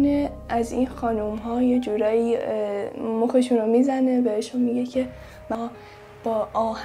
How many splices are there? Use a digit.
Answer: 2